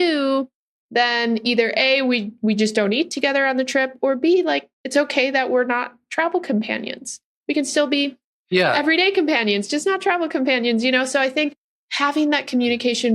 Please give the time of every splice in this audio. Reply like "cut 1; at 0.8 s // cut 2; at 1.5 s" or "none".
cut 1; at 4.7 s